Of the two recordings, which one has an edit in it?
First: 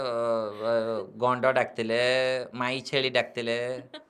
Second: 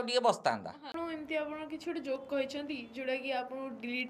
second; 1 cut; at 0.9 s

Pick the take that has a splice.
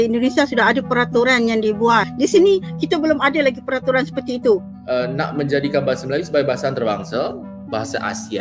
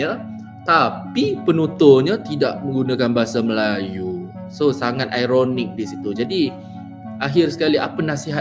first; 1 cut; at 4.7 s

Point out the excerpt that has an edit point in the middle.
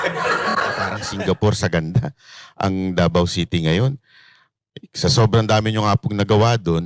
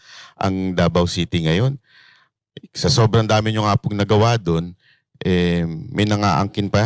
first; 1 cut; at 1.0 s

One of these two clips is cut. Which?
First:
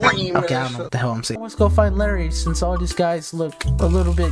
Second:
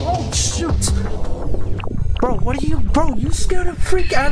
first; 1 cut; at 1.4 s

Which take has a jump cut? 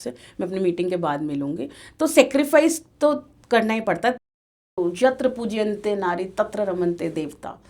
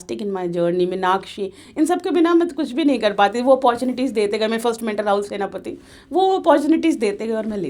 first; 1 cut; at 4.4 s

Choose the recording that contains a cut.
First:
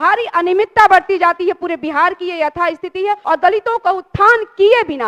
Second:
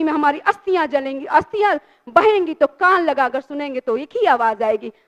first; 1 cut; at 3.2 s

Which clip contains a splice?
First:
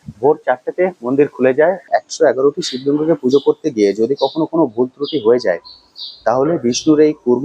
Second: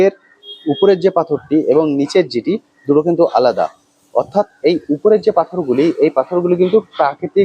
first; 1 cut; at 1.9 s

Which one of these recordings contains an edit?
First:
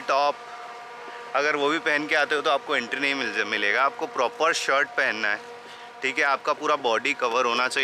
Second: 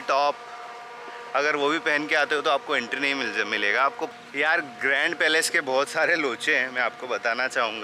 second; 1 cut; at 4.1 s

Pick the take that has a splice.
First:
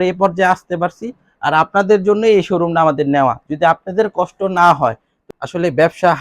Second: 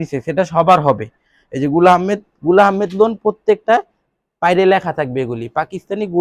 first; 1 cut; at 5.1 s

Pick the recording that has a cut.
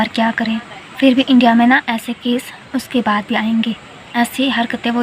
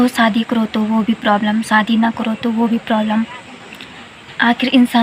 first; 2 cuts; at 0.9 s, 3.9 s

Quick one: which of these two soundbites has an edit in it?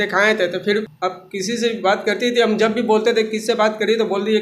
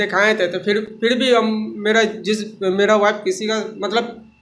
first; 1 cut; at 0.9 s

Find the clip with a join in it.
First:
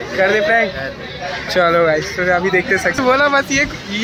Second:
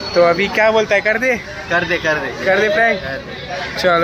first; 1 cut; at 3.0 s

